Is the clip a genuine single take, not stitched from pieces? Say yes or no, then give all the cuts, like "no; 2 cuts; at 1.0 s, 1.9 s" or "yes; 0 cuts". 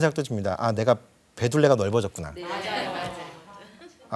yes; 0 cuts